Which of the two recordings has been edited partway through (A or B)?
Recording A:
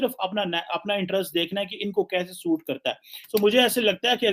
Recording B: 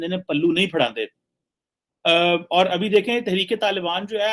A